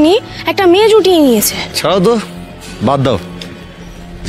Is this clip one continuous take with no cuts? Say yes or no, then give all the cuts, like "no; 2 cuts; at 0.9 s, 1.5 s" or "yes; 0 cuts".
no; 1 cut; at 1.6 s